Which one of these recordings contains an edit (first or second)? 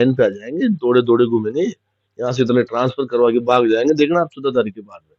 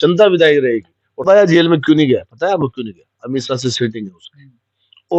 second